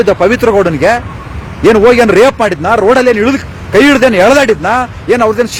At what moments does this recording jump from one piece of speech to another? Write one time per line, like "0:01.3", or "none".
none